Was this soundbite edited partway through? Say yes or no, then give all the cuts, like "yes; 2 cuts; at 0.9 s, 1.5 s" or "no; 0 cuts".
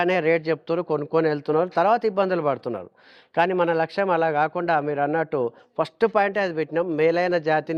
no; 0 cuts